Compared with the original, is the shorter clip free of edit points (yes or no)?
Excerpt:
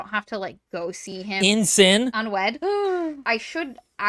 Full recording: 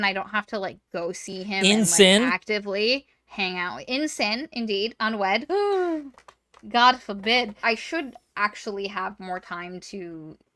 no